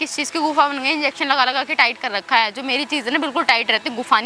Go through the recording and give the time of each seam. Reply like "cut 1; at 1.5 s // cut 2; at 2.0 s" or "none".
none